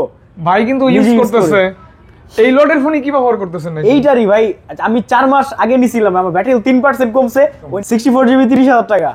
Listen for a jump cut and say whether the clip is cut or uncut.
cut